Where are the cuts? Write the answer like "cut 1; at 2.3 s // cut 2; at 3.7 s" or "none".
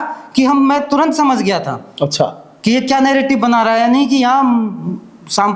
none